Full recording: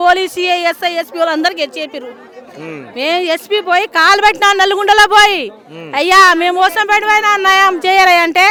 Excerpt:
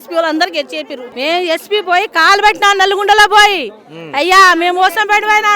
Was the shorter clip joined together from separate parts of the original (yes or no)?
yes